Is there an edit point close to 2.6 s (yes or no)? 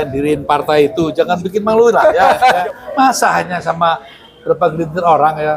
yes